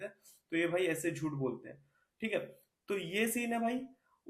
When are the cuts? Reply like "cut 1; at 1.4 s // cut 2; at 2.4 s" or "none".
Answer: none